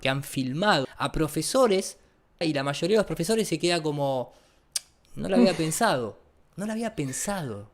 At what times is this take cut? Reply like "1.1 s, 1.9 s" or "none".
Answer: 0.9 s, 2.4 s